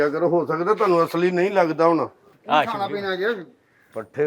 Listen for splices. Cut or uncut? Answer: cut